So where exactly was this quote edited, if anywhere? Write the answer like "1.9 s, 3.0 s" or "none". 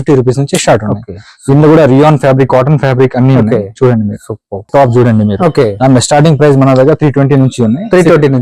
4.7 s

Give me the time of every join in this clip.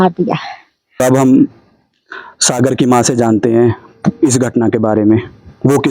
none

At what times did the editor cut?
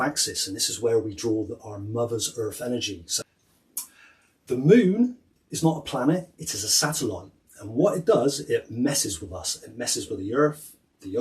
3.1 s

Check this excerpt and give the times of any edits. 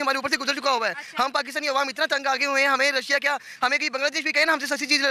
none

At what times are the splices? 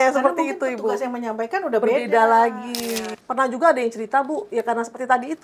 3.1 s

